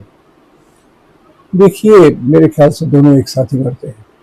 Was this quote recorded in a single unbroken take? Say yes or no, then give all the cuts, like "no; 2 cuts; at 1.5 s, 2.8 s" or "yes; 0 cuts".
yes; 0 cuts